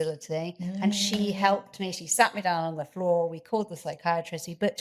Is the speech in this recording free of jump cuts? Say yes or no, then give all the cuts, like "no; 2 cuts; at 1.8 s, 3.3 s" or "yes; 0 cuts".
yes; 0 cuts